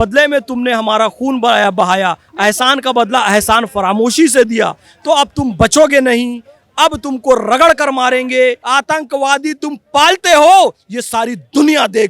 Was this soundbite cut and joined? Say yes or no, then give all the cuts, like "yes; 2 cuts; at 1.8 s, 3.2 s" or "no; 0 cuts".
yes; 1 cut; at 8.6 s